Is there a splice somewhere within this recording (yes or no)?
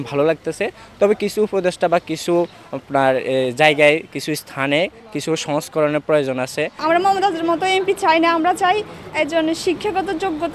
yes